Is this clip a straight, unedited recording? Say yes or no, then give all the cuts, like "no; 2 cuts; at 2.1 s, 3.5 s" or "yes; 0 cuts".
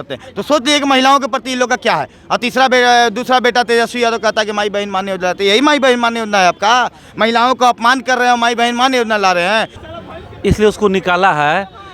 no; 1 cut; at 9.8 s